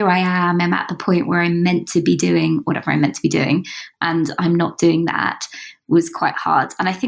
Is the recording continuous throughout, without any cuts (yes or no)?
yes